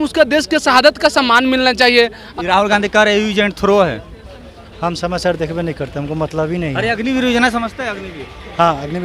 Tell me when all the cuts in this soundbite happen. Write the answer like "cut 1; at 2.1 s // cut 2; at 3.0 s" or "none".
cut 1; at 2.2 s

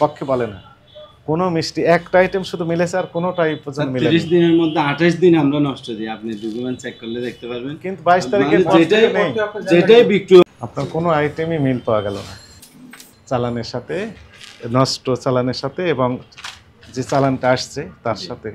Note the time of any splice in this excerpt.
cut 1; at 10.6 s

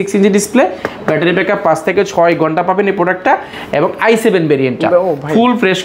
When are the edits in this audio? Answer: none

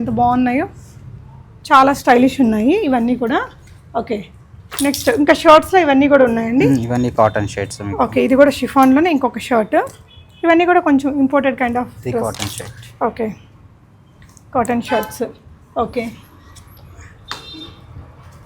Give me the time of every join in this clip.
none

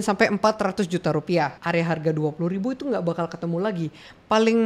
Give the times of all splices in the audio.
cut 1; at 1.5 s

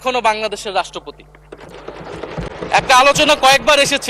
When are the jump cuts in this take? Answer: none

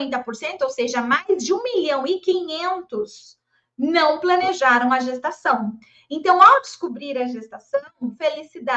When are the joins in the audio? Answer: none

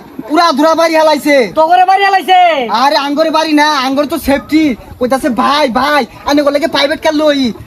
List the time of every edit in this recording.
none

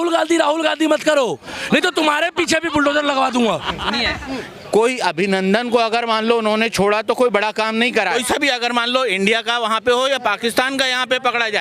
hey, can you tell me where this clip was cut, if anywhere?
cut 1; at 4.2 s // cut 2; at 8.2 s

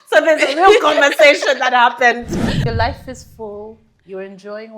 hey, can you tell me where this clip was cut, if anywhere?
cut 1; at 2.4 s

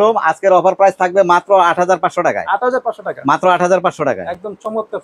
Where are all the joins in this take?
none

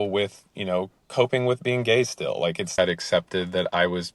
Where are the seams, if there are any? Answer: cut 1; at 2.7 s

